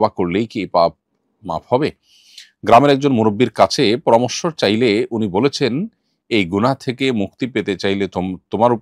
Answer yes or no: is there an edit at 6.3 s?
no